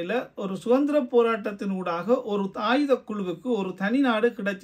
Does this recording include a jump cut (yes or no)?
no